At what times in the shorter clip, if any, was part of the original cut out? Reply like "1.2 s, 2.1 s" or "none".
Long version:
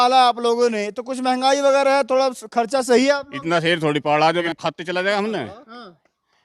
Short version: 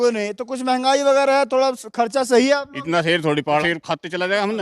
3.6 s